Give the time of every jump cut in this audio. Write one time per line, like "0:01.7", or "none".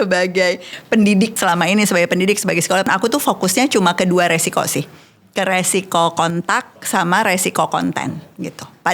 0:01.4
0:02.9